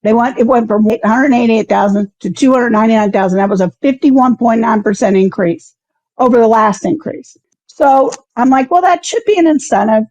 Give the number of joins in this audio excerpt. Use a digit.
2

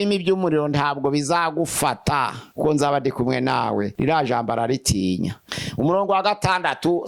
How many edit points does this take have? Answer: 3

